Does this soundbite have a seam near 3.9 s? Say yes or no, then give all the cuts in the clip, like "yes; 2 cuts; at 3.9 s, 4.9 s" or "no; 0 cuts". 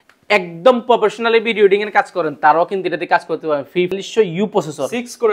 yes; 1 cut; at 3.9 s